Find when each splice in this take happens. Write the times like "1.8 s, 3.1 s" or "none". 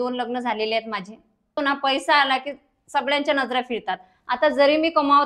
1.5 s